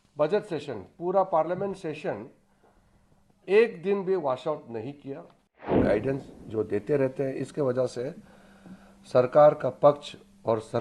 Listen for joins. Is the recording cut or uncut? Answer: cut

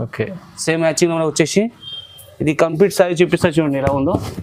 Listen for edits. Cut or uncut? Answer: uncut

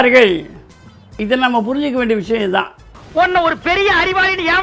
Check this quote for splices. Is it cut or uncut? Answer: cut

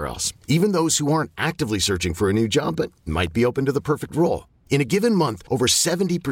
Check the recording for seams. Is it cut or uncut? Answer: uncut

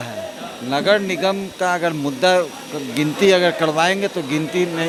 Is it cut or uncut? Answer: uncut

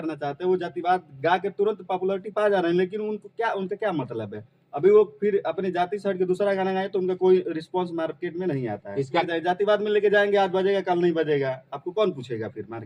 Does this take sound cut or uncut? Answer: cut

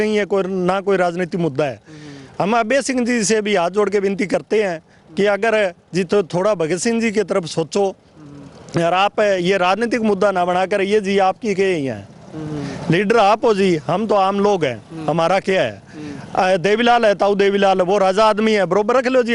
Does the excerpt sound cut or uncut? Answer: uncut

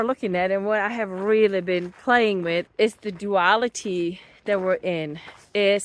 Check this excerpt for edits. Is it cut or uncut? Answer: cut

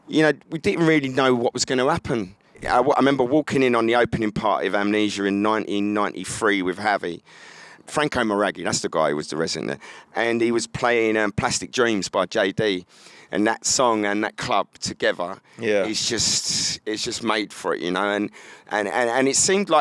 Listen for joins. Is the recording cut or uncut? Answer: cut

